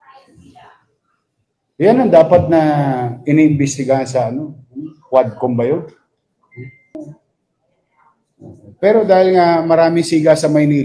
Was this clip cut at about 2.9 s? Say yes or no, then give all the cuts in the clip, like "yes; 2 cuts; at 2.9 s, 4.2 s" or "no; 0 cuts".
no; 1 cut; at 7.0 s